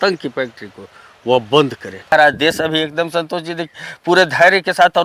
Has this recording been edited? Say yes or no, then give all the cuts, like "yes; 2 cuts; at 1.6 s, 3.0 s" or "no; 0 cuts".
yes; 1 cut; at 2.1 s